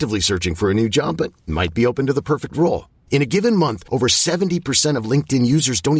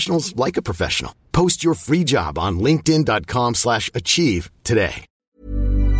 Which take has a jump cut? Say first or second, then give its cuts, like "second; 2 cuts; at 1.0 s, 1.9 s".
second; 1 cut; at 5.1 s